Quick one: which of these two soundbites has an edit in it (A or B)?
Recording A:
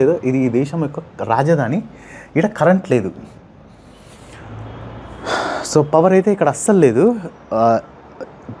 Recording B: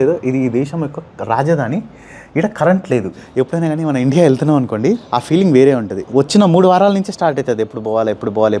B